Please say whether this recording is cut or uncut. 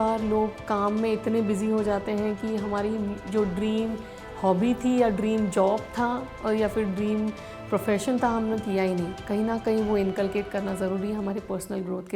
uncut